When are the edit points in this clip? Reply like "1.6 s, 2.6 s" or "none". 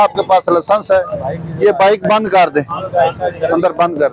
none